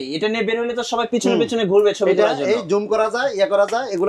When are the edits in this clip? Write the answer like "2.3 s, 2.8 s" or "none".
none